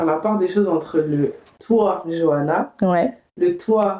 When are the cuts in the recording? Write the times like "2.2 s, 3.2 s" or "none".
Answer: none